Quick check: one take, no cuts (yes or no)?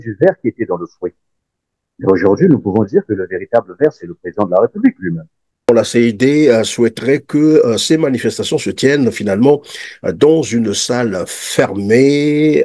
no